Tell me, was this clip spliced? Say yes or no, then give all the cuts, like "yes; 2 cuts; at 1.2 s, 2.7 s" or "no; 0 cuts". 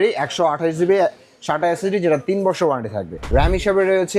yes; 1 cut; at 3.2 s